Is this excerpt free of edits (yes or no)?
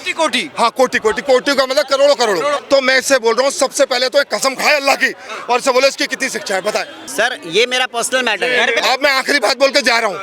no